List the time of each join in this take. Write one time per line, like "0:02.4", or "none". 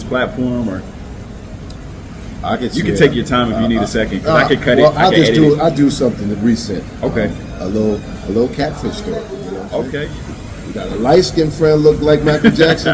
0:10.0